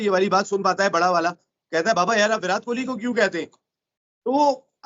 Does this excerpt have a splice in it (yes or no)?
no